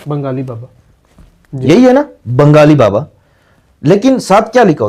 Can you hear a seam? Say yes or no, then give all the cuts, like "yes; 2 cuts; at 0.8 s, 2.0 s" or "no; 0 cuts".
no; 0 cuts